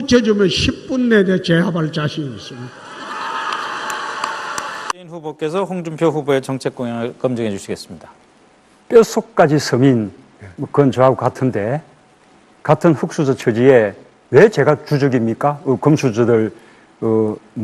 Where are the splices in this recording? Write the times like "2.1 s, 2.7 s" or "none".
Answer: none